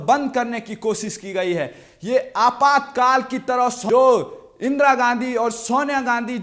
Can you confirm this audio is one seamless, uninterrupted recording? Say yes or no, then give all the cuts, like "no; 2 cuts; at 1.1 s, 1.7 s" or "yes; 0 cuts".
yes; 0 cuts